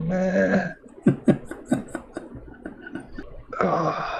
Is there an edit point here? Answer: yes; 1 cut; at 3.3 s

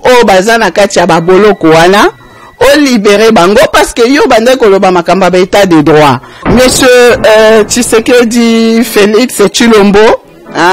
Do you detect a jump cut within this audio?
yes; 1 cut; at 6.3 s

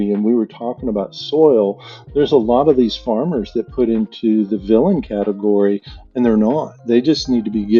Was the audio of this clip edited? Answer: no; 0 cuts

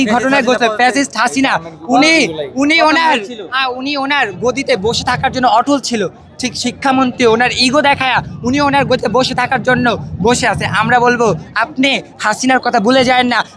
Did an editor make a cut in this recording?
no; 0 cuts

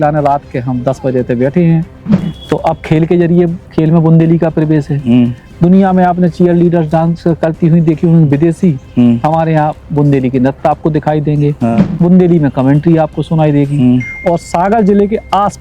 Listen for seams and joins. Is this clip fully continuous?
no; 1 cut; at 2.3 s

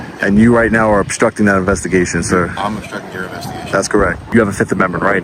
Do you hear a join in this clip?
yes; 1 cut; at 4.3 s

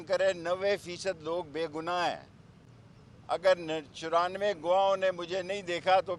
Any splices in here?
no; 0 cuts

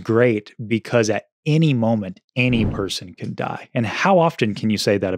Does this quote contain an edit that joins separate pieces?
no; 0 cuts

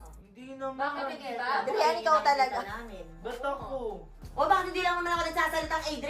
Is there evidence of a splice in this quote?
yes; 1 cut; at 4.2 s

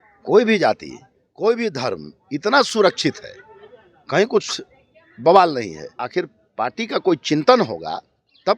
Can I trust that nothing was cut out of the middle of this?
no; 1 cut; at 6.0 s

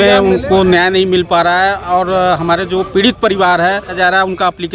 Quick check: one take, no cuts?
no; 1 cut; at 3.7 s

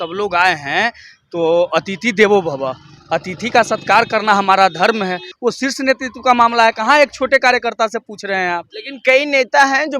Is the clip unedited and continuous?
no; 1 cut; at 5.3 s

